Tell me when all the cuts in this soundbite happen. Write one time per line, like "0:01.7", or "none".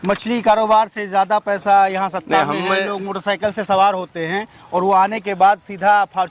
none